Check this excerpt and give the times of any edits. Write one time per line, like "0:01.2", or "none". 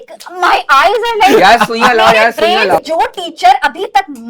0:02.8